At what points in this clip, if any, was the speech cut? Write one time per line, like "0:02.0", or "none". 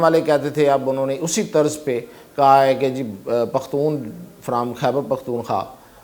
none